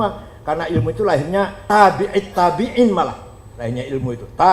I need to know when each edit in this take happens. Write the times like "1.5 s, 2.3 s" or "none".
1.6 s